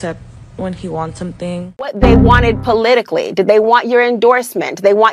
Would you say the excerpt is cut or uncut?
cut